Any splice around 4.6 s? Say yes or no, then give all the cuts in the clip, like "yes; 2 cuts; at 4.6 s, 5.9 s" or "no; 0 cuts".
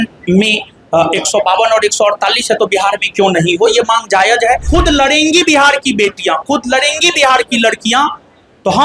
yes; 1 cut; at 4.6 s